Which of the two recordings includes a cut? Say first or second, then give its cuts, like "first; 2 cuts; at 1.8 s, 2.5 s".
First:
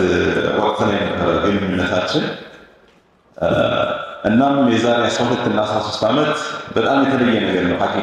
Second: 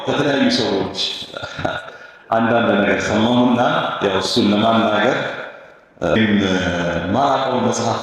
second; 1 cut; at 6.2 s